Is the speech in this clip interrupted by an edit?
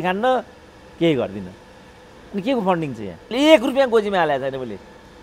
yes; 1 cut; at 3.3 s

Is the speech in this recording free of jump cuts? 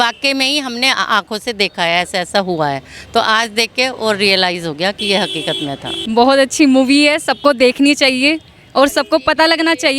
no; 1 cut; at 5.9 s

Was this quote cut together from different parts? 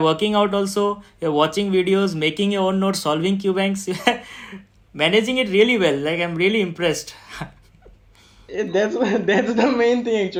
no; 0 cuts

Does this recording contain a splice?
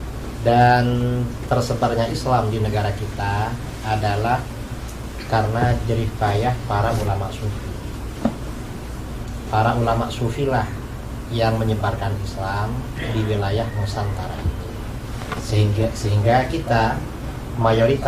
no; 0 cuts

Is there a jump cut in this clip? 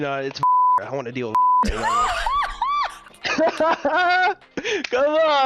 no; 0 cuts

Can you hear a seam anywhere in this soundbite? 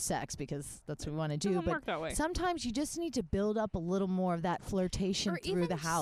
no; 0 cuts

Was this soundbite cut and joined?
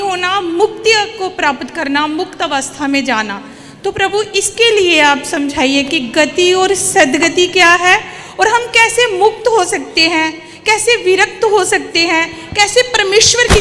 no; 0 cuts

